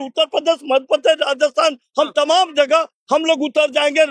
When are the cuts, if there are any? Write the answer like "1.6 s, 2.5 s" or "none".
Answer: none